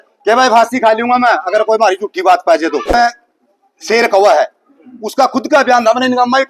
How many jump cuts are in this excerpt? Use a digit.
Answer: 1